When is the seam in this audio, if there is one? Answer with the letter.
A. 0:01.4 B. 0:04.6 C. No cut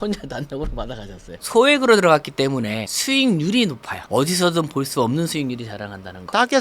A